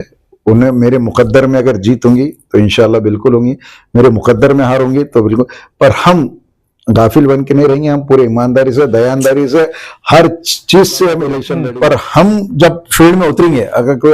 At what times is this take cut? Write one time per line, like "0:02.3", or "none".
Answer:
0:11.5